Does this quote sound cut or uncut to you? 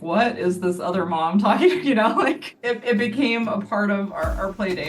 cut